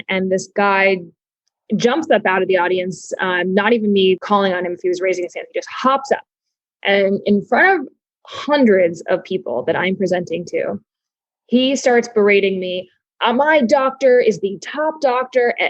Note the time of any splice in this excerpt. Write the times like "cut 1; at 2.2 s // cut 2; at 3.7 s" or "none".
cut 1; at 4.2 s